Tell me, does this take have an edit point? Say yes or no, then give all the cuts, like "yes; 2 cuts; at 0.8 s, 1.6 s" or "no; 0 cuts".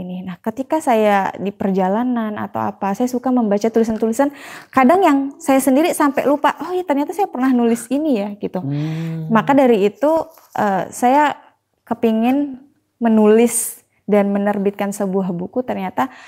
no; 0 cuts